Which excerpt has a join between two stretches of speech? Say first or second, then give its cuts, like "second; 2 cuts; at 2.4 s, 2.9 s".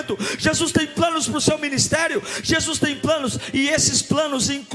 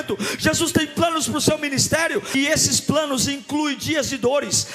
second; 1 cut; at 2.3 s